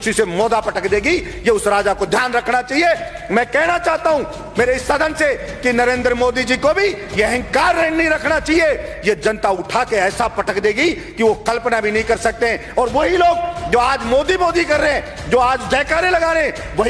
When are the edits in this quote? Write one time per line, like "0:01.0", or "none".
none